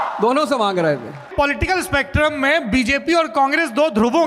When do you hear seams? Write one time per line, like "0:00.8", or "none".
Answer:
0:01.3